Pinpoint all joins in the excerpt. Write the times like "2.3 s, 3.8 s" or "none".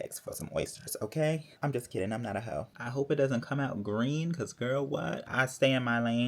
1.5 s, 2.8 s, 5.2 s